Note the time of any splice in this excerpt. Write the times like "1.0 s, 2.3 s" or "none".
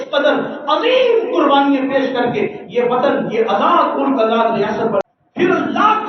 5.0 s